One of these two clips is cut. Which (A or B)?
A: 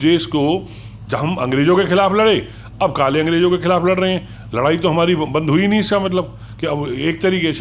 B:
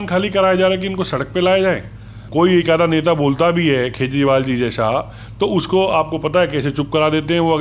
B